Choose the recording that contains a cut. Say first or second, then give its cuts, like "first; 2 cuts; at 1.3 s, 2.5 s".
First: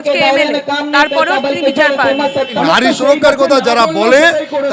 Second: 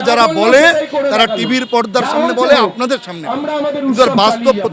first; 1 cut; at 2.6 s